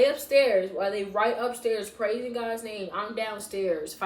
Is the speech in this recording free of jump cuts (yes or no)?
yes